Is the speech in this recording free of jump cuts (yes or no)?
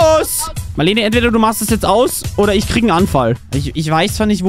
no